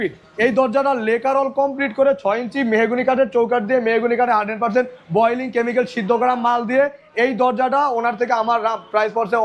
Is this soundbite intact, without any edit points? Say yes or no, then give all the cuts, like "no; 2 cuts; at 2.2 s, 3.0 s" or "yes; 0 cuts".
yes; 0 cuts